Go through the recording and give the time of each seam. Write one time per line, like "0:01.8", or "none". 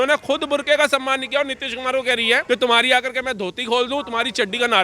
0:02.4